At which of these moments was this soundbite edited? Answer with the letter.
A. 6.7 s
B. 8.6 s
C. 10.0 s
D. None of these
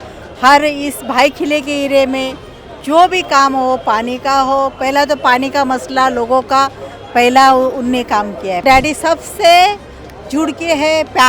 B